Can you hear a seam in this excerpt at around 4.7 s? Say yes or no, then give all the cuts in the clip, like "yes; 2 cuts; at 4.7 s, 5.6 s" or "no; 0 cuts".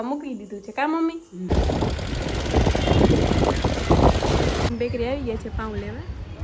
yes; 2 cuts; at 1.5 s, 4.7 s